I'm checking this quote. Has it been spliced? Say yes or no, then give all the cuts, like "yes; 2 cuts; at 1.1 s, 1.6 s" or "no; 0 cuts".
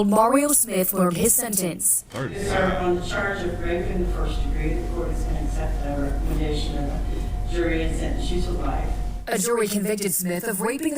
yes; 2 cuts; at 1.9 s, 9.5 s